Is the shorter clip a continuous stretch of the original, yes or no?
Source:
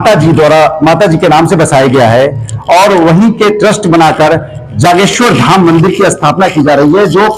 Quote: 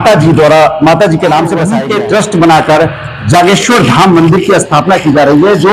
no